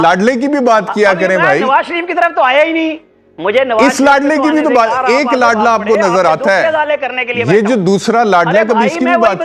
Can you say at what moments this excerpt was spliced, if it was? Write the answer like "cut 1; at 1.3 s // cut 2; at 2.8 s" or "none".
none